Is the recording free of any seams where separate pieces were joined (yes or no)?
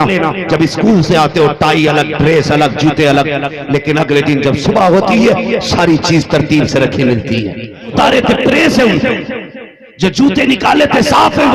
no